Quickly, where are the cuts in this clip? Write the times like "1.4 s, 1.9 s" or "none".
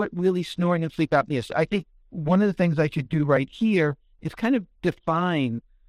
none